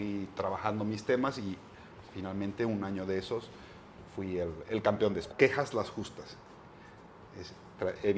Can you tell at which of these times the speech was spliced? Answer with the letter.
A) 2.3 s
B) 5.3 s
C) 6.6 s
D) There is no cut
B